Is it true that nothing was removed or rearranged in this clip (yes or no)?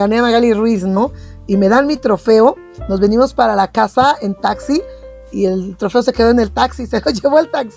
yes